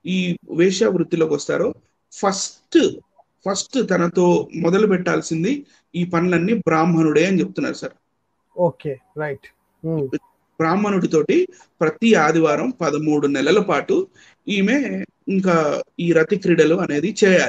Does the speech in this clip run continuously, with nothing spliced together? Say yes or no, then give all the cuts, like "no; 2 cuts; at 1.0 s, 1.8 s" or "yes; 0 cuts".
yes; 0 cuts